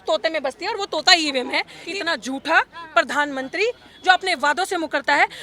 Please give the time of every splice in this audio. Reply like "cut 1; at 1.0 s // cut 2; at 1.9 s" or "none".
cut 1; at 1.8 s